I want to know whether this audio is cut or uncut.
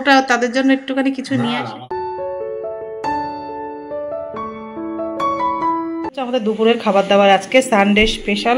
cut